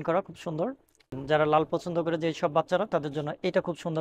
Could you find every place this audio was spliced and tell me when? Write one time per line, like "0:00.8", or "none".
0:01.1

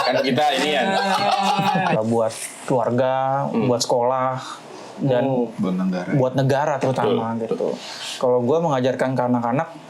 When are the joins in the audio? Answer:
0:02.0

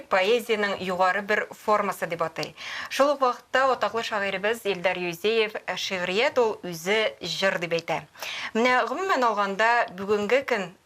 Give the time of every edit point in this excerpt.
none

